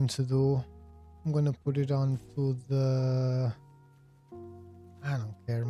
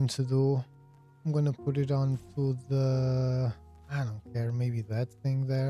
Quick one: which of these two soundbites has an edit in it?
second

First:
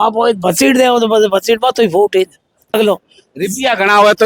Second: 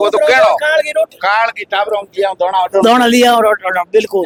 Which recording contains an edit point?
first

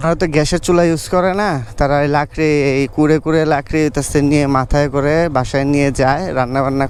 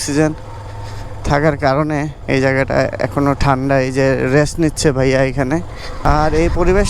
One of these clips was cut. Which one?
second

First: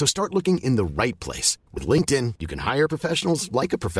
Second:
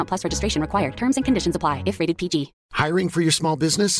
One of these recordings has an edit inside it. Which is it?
second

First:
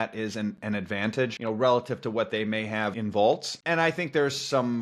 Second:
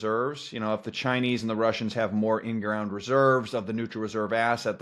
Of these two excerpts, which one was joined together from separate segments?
first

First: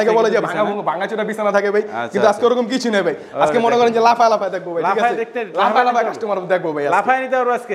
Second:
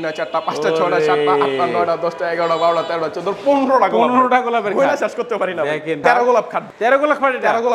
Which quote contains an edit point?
second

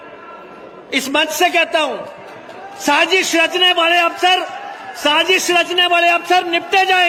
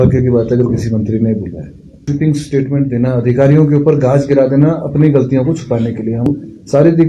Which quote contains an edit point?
second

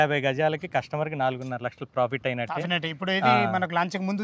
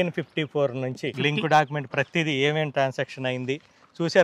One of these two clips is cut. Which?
second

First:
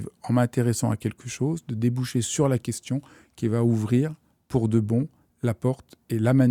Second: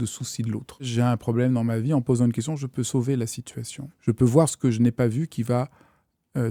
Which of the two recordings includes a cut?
second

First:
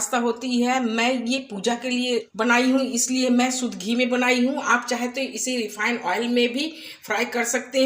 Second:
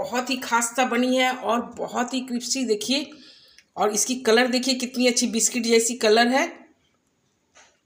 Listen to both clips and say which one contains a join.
first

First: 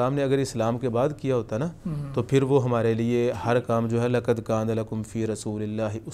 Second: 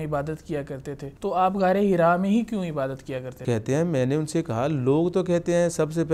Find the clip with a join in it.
second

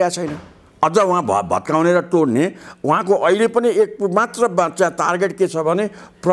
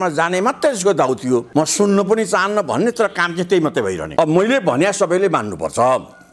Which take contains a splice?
second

